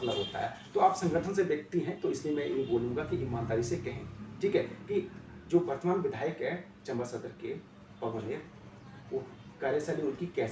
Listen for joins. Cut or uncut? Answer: uncut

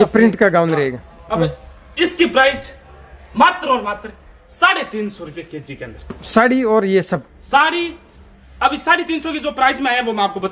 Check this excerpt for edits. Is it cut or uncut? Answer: uncut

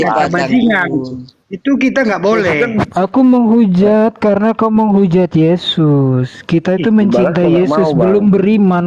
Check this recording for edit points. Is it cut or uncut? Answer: uncut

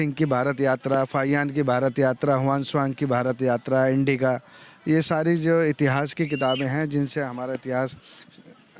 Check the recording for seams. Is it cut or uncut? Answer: uncut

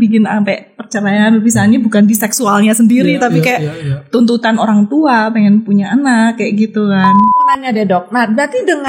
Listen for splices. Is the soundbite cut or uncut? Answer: cut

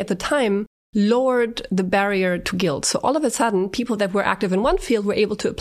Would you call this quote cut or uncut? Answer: uncut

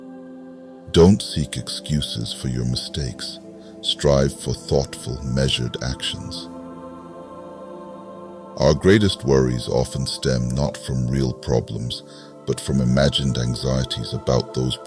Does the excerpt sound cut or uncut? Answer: cut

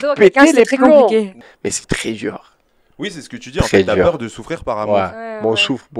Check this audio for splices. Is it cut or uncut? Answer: cut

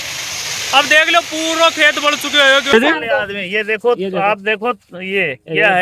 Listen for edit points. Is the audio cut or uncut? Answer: cut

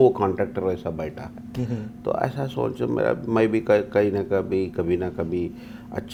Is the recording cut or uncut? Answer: uncut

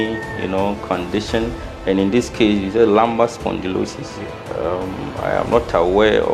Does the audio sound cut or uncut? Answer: cut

